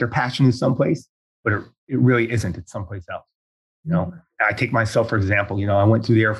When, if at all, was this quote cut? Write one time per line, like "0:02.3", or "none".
none